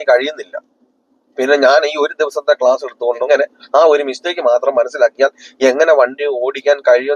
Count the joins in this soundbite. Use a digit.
1